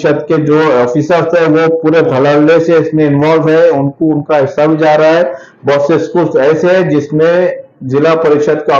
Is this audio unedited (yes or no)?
yes